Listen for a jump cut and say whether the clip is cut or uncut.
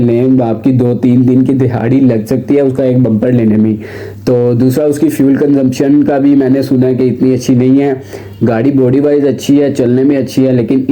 uncut